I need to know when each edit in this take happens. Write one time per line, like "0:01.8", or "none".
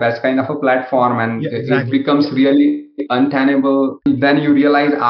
0:04.0

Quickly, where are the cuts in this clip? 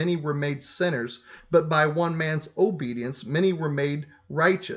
none

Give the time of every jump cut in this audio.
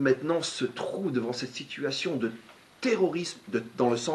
none

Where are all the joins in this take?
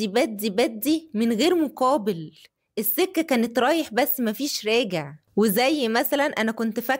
none

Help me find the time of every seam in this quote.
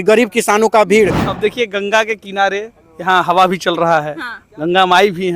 0:01.2

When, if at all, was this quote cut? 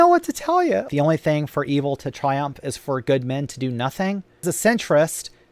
0:00.9
0:04.4

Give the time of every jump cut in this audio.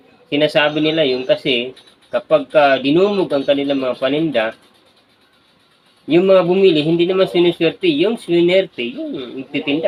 none

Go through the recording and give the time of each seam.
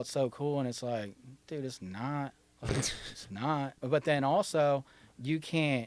0:03.7

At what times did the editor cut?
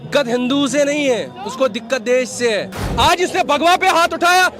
0:02.8

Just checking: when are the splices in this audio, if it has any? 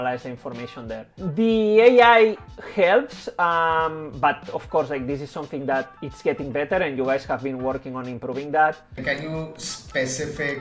none

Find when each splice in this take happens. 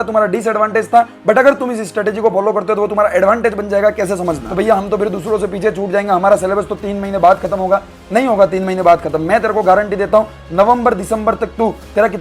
0:04.4

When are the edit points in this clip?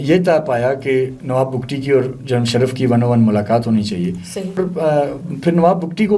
0:04.6

